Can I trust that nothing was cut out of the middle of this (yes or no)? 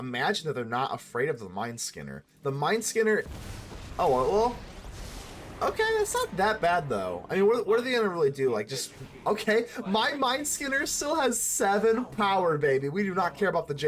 yes